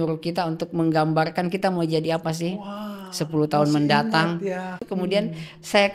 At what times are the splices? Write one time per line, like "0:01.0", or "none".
0:04.9